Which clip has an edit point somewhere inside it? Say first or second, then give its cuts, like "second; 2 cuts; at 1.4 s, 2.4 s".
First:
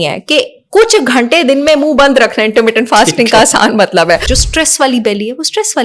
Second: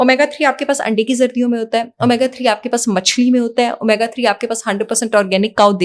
first; 1 cut; at 4.3 s